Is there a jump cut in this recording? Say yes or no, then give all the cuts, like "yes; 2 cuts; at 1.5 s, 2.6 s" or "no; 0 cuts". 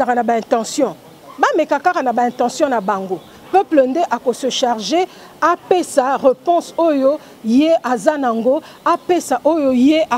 no; 0 cuts